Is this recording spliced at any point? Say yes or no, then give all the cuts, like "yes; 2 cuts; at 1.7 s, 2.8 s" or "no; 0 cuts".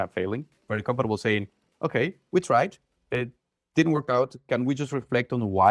no; 0 cuts